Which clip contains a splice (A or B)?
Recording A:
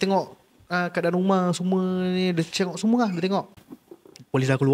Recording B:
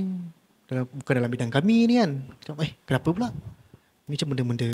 A